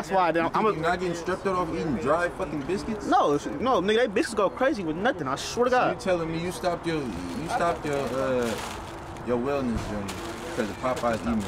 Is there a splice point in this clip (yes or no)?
no